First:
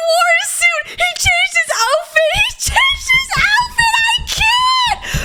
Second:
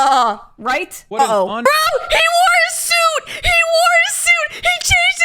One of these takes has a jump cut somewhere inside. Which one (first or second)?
second